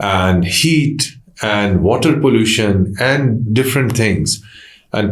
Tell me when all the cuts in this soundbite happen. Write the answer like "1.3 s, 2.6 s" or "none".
none